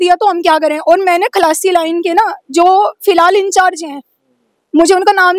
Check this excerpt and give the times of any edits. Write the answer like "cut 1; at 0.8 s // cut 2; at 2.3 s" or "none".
none